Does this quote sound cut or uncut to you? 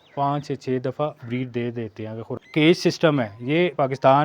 cut